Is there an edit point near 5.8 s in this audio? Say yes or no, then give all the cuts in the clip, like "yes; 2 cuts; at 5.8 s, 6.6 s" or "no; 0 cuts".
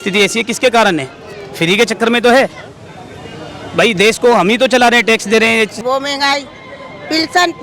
yes; 1 cut; at 5.8 s